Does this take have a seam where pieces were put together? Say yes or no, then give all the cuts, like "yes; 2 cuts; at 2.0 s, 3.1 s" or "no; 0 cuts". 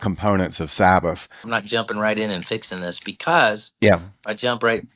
yes; 1 cut; at 1.5 s